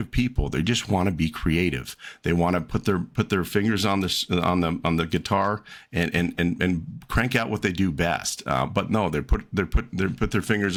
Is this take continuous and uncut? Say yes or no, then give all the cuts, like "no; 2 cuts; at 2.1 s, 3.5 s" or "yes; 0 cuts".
yes; 0 cuts